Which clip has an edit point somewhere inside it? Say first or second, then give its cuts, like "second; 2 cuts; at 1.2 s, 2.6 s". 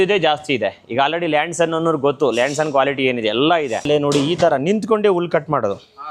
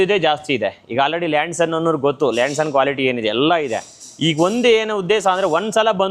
first; 1 cut; at 3.9 s